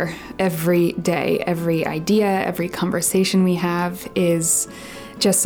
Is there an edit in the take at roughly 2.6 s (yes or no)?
no